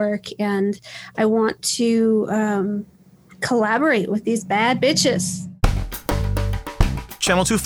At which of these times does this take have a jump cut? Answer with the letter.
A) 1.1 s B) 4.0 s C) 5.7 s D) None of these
C